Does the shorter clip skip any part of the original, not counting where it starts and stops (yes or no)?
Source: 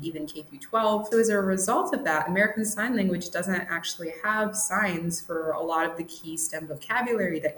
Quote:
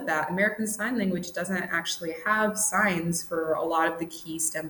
no